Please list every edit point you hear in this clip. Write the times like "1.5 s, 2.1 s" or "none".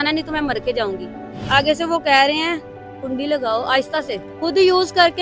4.2 s